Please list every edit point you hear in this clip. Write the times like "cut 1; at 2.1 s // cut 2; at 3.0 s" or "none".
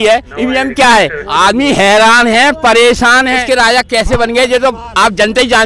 cut 1; at 1.2 s // cut 2; at 3.4 s